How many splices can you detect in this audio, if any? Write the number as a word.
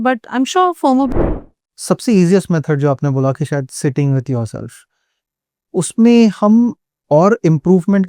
one